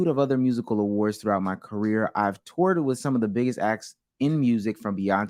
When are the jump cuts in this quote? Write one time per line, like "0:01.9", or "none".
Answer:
none